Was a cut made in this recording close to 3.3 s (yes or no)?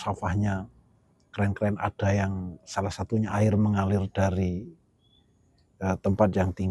yes